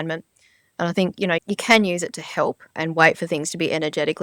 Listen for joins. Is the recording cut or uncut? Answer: cut